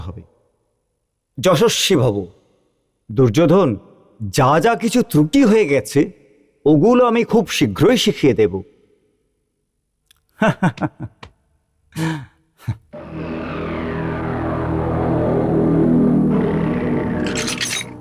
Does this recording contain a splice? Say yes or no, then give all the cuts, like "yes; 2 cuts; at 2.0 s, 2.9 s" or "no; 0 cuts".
no; 0 cuts